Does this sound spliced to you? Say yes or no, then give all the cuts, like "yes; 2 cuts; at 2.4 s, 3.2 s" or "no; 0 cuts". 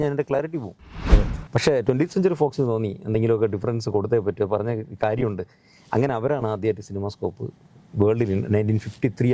yes; 1 cut; at 1.0 s